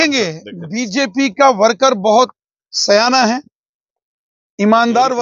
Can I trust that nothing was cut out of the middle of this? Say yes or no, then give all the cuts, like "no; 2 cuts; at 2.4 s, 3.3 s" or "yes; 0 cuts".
yes; 0 cuts